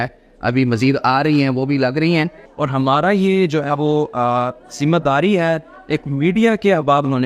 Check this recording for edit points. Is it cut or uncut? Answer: cut